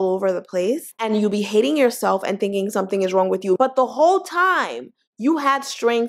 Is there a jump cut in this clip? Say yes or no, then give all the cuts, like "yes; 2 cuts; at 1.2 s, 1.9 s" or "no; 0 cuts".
no; 0 cuts